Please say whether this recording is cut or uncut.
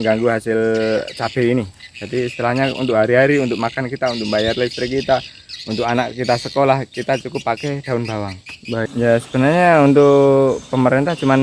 cut